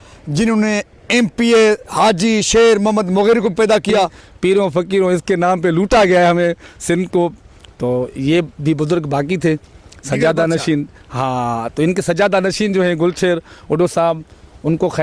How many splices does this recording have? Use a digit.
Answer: 1